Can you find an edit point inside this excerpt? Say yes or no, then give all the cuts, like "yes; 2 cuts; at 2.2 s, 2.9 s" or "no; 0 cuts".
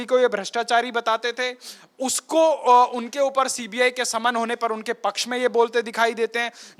no; 0 cuts